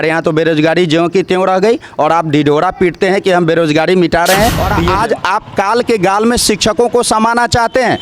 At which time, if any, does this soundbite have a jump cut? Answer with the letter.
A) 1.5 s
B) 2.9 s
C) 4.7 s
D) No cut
C